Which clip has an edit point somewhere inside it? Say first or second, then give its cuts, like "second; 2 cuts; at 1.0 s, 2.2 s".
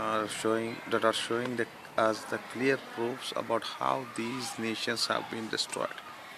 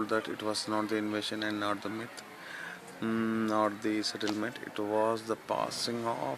second; 1 cut; at 1.5 s